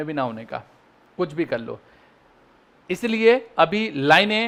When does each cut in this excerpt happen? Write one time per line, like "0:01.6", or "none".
none